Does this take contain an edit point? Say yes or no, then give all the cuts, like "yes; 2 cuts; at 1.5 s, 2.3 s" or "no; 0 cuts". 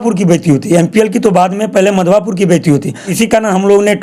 yes; 1 cut; at 3.1 s